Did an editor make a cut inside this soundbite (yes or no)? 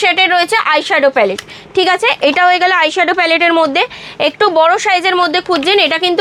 no